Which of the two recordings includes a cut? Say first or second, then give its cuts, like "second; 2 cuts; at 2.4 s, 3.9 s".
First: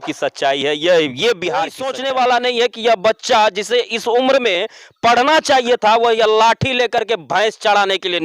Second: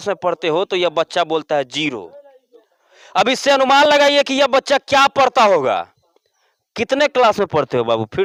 first; 1 cut; at 1.9 s